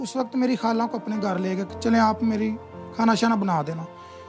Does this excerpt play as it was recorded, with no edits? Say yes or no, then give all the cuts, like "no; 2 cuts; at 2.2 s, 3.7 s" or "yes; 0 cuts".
yes; 0 cuts